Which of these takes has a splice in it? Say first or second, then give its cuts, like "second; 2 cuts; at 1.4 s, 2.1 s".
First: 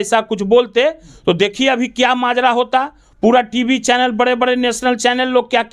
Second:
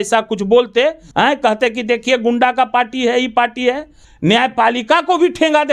second; 2 cuts; at 1.0 s, 4.0 s